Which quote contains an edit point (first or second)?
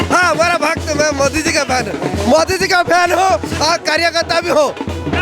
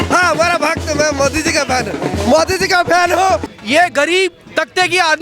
second